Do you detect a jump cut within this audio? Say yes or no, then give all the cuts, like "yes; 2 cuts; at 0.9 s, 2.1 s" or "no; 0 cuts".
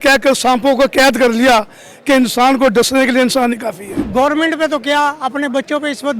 yes; 1 cut; at 3.9 s